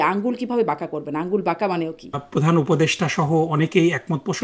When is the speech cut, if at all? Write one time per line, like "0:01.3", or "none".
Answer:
0:02.2